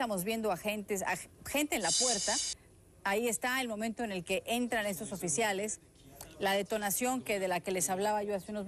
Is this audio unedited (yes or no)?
no